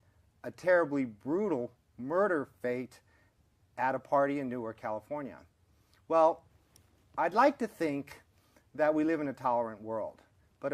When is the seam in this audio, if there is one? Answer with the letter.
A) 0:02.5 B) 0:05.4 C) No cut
A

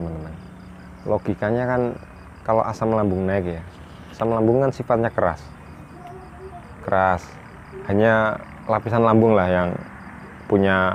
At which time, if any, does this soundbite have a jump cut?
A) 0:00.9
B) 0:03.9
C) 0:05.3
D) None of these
D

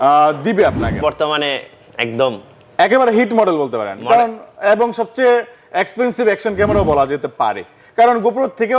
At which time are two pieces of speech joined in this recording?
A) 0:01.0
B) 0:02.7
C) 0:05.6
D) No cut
A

